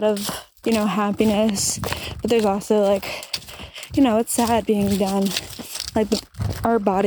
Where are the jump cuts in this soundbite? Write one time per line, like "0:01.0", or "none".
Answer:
none

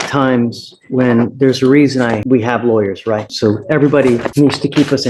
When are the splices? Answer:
0:02.2
0:03.3
0:04.3

